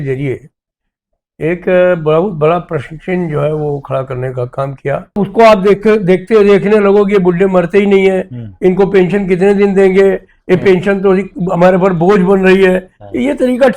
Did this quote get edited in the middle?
yes; 1 cut; at 5.2 s

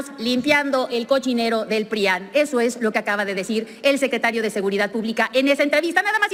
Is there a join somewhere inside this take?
no; 0 cuts

